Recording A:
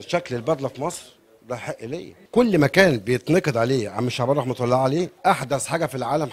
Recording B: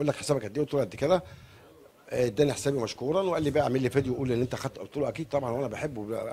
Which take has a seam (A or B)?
A